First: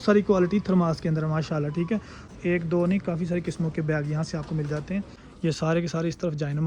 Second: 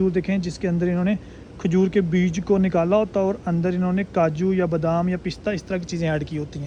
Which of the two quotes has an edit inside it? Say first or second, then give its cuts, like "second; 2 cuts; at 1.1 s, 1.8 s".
first; 2 cuts; at 2.2 s, 5.2 s